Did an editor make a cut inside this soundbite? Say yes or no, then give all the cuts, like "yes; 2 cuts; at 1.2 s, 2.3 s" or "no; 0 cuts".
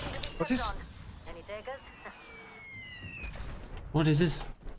no; 0 cuts